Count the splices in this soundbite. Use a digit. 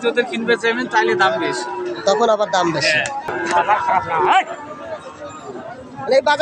1